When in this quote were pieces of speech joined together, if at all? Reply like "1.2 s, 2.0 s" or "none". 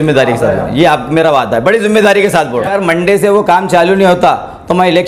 2.7 s